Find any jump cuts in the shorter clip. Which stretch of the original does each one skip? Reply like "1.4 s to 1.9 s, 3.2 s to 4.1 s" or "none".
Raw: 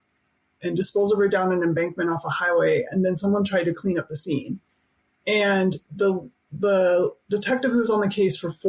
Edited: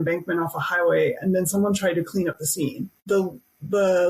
4.6 s to 5.9 s